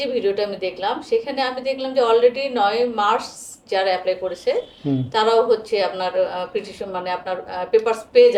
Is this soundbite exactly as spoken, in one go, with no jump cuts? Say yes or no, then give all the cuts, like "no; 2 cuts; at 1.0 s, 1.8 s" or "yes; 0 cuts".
yes; 0 cuts